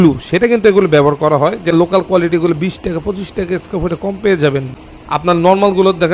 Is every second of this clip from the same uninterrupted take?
no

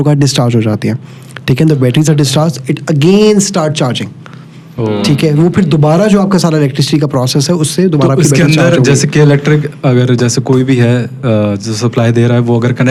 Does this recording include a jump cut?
no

